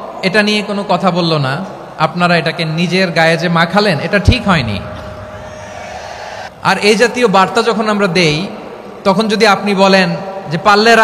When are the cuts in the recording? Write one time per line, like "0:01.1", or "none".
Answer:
0:06.5